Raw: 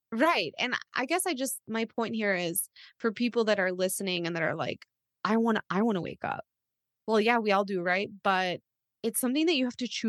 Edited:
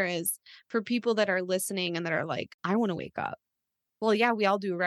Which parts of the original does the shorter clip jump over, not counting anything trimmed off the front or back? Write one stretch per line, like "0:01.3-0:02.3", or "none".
0:04.9-0:05.7